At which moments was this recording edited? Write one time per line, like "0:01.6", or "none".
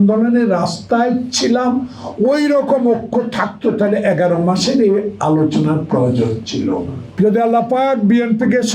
0:07.2